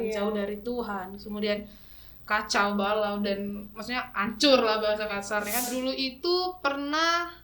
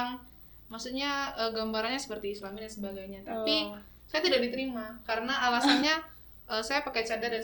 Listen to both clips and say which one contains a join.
first; 1 cut; at 5.7 s

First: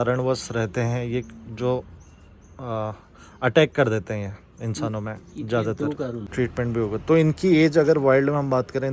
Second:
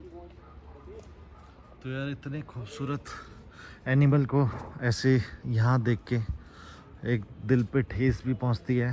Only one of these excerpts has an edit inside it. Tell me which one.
first; 1 cut; at 6.3 s

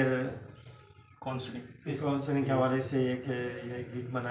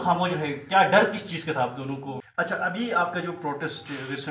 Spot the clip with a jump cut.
second; 1 cut; at 2.6 s

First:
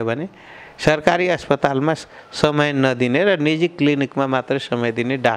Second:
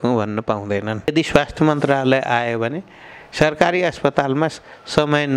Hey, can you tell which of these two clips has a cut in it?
second; 1 cut; at 1.1 s

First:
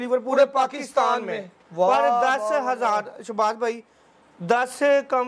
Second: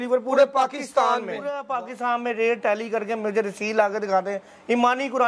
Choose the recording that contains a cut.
second; 1 cut; at 1.7 s

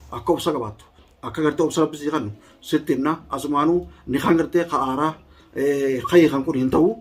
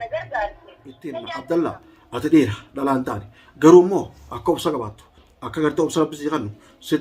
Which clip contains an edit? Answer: second; 1 cut; at 1.1 s

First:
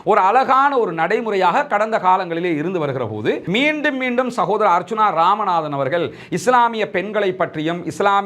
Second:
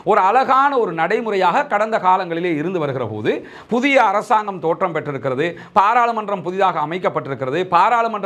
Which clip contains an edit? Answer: first; 1 cut; at 3.4 s

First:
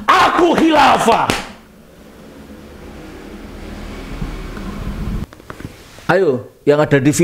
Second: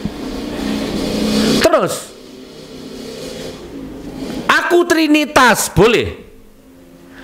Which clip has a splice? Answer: first; 1 cut; at 5.2 s

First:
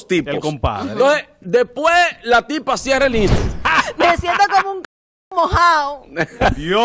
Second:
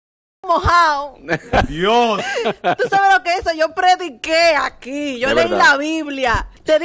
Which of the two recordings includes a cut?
first; 1 cut; at 3.3 s

